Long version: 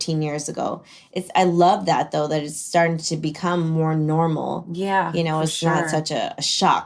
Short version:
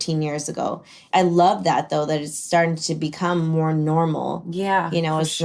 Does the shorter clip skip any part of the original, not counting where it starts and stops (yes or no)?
yes